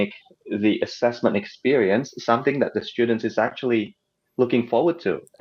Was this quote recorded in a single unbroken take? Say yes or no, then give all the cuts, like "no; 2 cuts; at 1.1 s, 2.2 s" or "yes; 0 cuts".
yes; 0 cuts